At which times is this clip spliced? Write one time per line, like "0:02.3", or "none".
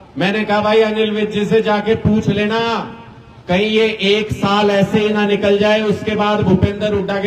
none